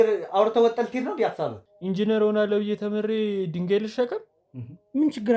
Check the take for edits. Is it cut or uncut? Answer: cut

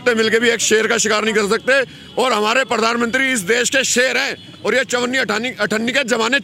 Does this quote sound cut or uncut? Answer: uncut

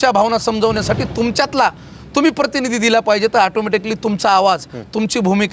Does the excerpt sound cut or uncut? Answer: uncut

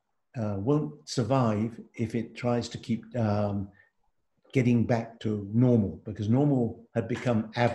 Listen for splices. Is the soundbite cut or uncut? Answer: uncut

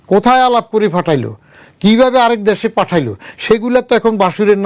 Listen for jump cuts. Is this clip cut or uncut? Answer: uncut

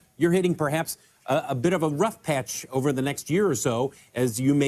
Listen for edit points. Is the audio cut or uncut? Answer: uncut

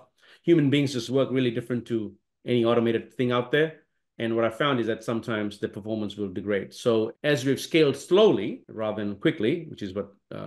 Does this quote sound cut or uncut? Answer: uncut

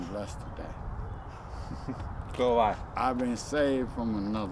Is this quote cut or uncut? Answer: uncut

